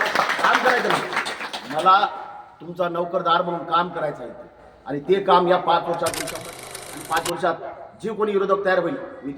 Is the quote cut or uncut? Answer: cut